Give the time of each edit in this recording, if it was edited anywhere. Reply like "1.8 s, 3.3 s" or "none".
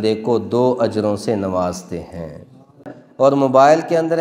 2.8 s